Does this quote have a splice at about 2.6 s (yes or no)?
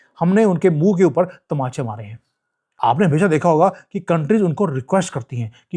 yes